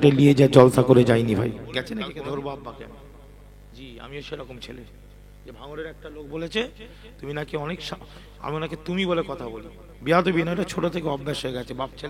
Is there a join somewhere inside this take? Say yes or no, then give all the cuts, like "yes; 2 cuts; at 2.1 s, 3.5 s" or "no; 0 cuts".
yes; 1 cut; at 2.1 s